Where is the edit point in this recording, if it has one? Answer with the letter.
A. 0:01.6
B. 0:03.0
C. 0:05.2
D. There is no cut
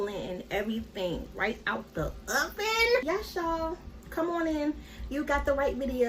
B